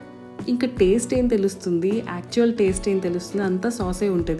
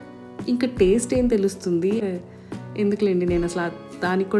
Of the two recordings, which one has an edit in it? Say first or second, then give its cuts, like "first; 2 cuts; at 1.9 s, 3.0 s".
second; 1 cut; at 2.0 s